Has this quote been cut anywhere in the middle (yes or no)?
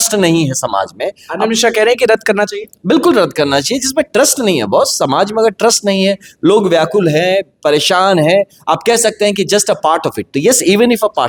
no